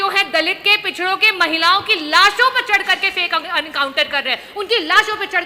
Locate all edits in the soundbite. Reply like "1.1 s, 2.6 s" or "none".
none